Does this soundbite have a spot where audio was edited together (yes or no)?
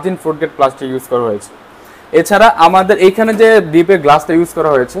no